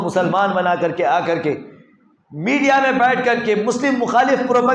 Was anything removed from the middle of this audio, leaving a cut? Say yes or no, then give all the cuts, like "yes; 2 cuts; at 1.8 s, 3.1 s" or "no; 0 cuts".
no; 0 cuts